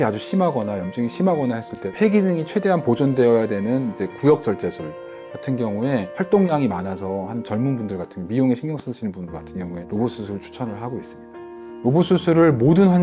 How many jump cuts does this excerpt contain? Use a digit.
3